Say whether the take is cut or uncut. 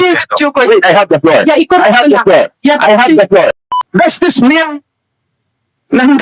cut